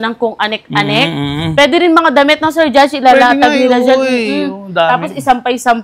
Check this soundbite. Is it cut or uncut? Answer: uncut